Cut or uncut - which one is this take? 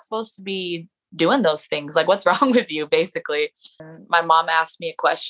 cut